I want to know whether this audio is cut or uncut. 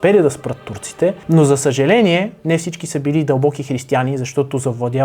cut